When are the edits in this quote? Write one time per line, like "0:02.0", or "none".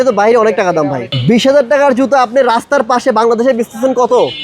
0:01.1